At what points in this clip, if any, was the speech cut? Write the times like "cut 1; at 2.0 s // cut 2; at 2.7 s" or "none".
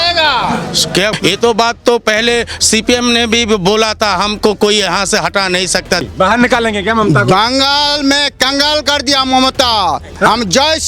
cut 1; at 1.1 s // cut 2; at 6.0 s